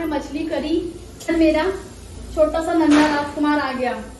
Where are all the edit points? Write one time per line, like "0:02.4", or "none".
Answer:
0:01.3